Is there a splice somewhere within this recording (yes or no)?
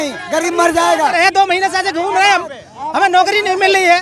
yes